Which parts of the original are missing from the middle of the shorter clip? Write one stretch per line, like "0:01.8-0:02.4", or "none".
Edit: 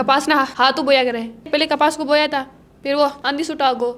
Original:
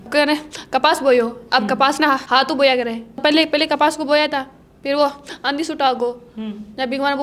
0:03.2-0:03.5
0:05.2-0:05.4